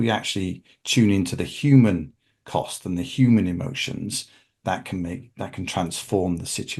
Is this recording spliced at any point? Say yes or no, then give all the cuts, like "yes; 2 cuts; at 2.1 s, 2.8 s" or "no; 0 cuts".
no; 0 cuts